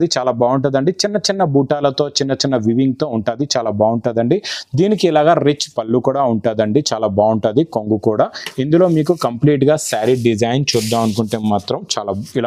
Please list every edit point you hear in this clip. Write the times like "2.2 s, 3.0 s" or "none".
none